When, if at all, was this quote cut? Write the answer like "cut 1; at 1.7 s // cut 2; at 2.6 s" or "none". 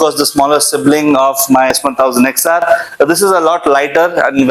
none